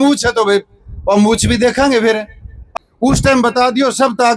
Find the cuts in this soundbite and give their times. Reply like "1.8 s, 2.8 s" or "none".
2.7 s

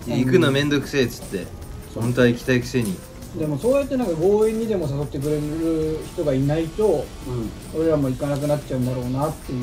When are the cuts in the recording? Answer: none

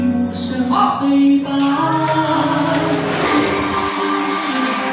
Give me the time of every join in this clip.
2.2 s

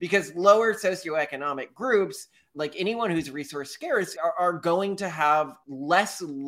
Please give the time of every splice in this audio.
4.1 s, 5.6 s

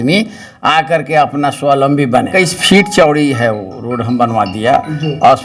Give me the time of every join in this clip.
2.3 s

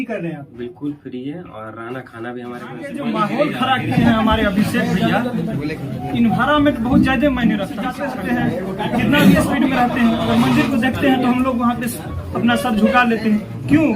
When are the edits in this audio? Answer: 2.9 s, 8.0 s

